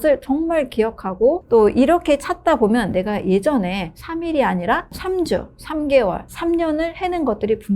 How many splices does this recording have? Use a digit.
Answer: 1